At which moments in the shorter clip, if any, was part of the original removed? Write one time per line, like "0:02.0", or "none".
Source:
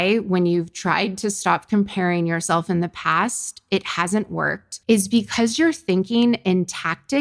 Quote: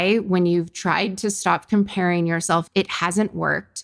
0:02.6